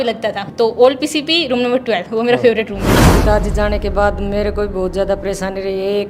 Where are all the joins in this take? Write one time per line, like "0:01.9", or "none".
0:03.0